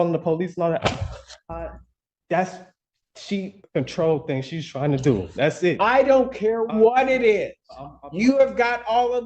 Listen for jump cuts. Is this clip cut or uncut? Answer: cut